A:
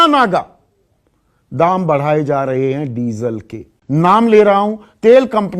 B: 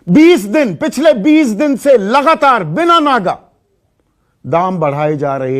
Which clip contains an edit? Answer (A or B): A